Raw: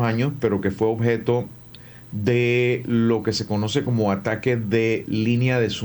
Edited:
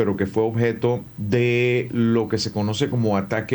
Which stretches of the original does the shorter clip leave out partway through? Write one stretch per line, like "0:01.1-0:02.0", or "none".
0:01.6-0:02.1